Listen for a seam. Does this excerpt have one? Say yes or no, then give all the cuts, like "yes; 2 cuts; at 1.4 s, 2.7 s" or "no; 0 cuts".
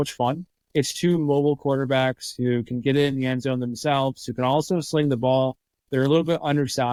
no; 0 cuts